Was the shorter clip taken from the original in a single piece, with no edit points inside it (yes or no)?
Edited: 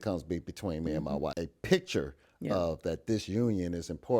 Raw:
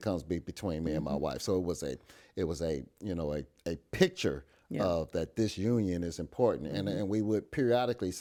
no